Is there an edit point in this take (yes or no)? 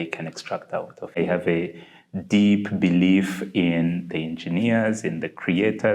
yes